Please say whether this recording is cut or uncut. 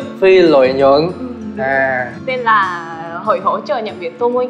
cut